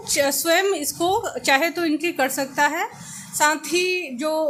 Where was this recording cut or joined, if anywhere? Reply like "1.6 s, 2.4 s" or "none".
none